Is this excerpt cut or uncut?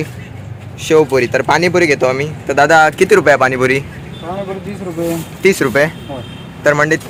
uncut